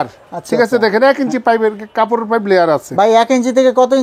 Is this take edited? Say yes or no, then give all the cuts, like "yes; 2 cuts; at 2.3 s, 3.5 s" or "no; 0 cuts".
no; 0 cuts